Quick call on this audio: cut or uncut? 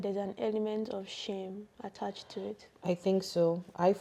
uncut